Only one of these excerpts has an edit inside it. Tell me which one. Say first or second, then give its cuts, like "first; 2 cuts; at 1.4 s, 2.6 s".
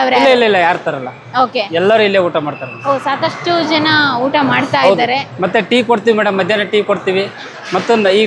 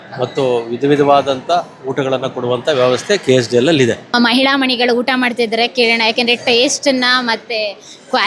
second; 1 cut; at 4.1 s